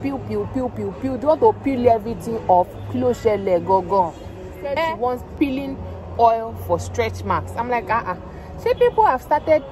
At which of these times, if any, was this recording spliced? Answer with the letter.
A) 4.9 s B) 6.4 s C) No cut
A